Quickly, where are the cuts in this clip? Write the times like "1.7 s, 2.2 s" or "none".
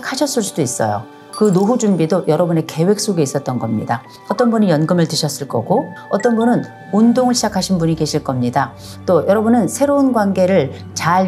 none